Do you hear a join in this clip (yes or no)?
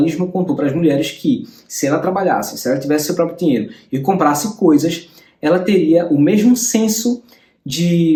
no